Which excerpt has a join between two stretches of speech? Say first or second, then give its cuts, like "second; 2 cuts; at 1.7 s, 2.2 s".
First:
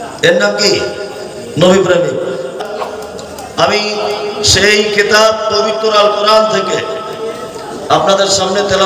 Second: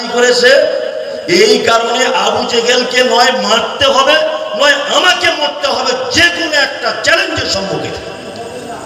first; 1 cut; at 2.5 s